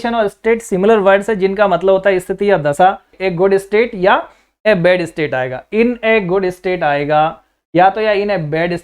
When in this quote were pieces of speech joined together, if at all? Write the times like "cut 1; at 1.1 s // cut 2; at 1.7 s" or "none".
cut 1; at 3.1 s